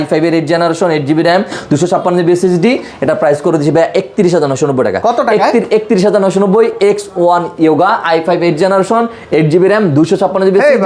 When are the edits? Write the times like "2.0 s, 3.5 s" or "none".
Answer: none